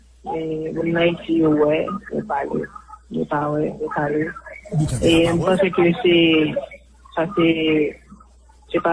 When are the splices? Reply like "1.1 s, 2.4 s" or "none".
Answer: none